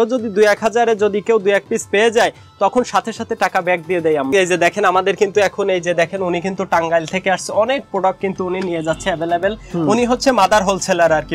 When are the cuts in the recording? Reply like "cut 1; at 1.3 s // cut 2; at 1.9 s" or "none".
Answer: cut 1; at 4.3 s